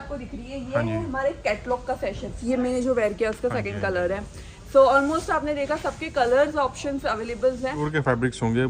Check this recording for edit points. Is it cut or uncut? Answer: cut